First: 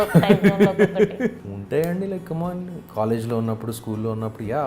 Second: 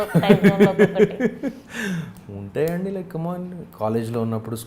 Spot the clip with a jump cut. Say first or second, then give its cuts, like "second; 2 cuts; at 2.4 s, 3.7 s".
first; 1 cut; at 1.4 s